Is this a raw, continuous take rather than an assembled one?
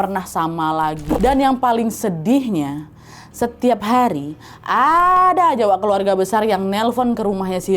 no; 1 cut; at 1.2 s

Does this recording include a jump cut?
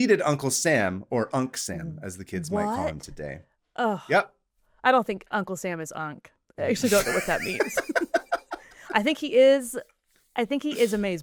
no; 0 cuts

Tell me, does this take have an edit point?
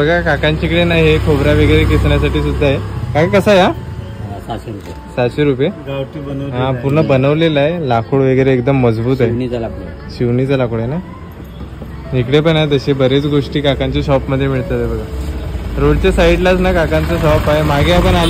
no; 0 cuts

